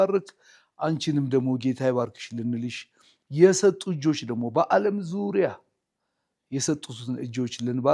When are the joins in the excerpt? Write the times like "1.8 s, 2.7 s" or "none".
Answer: none